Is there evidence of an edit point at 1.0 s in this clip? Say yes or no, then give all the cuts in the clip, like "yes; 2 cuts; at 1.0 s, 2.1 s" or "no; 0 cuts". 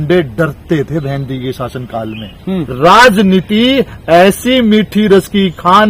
no; 1 cut; at 2.6 s